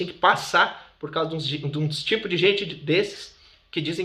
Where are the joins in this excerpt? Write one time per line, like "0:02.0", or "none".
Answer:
none